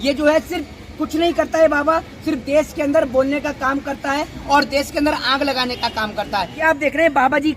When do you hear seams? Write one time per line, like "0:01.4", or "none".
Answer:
0:06.6